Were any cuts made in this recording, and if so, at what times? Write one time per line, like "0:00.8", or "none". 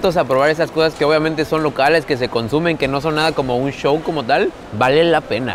0:04.6